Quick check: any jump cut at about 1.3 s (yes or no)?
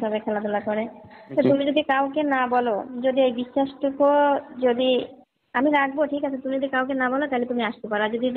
yes